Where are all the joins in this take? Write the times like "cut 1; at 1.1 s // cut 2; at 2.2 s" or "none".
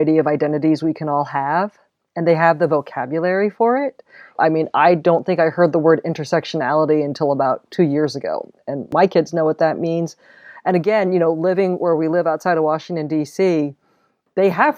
none